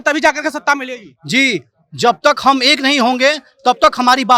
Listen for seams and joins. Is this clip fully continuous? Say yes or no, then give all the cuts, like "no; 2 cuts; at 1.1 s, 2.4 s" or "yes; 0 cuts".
yes; 0 cuts